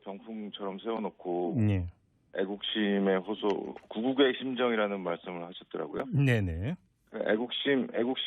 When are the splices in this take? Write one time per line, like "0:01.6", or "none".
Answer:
0:05.9